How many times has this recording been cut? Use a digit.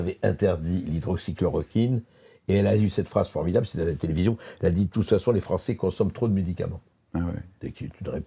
0